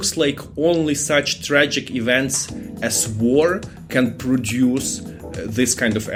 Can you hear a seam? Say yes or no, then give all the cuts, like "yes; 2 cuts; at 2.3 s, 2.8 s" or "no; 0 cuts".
no; 0 cuts